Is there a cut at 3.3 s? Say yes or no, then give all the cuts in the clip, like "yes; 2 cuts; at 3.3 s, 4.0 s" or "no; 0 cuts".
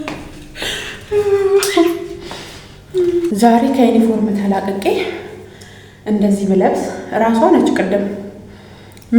yes; 1 cut; at 3.3 s